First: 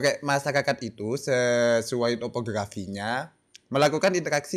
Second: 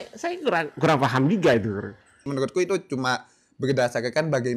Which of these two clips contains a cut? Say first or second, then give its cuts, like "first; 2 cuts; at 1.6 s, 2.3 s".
second; 1 cut; at 2.3 s